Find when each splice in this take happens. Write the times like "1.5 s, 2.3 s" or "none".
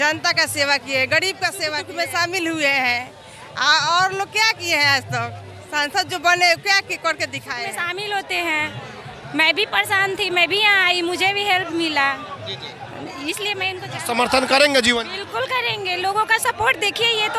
1.8 s, 7.8 s, 13.8 s